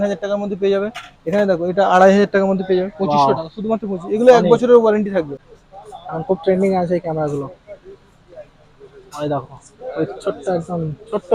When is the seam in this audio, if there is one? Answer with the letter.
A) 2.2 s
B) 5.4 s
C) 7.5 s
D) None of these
B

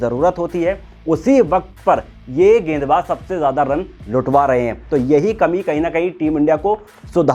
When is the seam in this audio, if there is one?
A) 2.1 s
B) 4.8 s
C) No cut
C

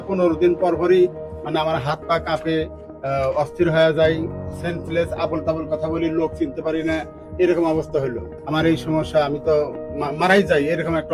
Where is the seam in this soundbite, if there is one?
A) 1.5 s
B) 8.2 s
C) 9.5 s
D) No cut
B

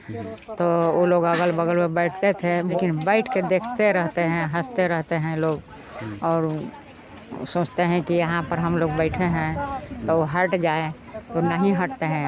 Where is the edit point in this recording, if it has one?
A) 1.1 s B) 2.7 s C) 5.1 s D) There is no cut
B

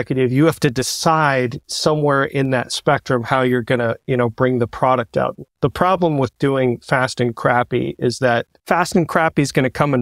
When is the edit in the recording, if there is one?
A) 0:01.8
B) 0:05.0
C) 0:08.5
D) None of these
C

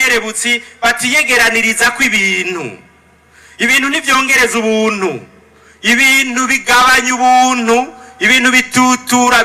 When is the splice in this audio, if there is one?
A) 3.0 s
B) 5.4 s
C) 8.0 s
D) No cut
D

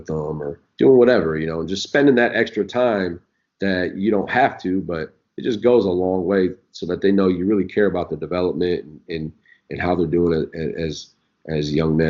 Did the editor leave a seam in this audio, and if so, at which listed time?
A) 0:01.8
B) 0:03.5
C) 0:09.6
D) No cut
D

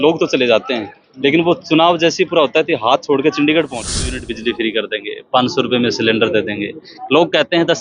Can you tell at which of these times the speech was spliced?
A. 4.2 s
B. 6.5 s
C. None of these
A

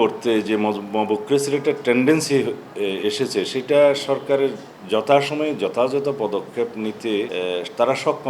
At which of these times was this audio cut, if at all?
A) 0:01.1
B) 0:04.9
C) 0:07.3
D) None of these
C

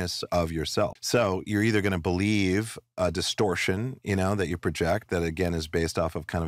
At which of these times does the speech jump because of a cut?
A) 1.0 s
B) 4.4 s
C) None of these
A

